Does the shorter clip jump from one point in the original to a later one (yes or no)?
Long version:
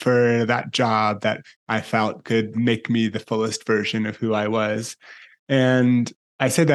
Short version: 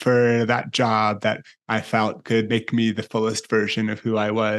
yes